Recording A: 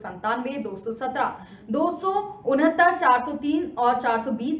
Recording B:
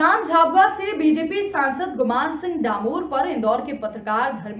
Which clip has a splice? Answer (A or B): B